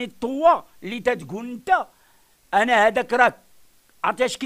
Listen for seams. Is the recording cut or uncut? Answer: uncut